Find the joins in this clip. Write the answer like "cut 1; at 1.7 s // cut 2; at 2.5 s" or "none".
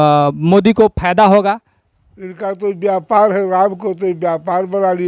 none